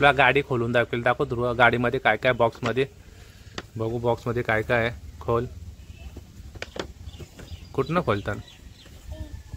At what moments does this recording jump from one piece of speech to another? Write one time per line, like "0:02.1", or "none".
none